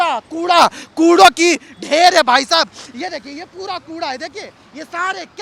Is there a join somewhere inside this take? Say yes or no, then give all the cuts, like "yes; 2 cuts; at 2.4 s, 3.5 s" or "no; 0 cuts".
no; 0 cuts